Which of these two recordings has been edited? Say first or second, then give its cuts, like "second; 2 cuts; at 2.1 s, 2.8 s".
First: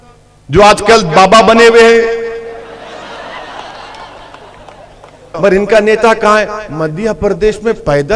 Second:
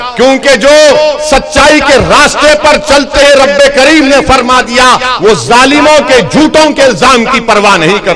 first; 1 cut; at 5.3 s